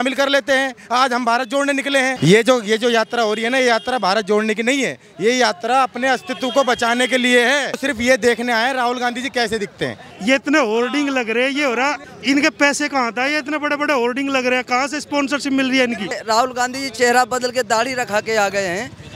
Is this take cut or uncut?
cut